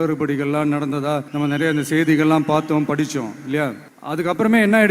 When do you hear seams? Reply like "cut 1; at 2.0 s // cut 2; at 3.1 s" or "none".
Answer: cut 1; at 1.3 s // cut 2; at 3.9 s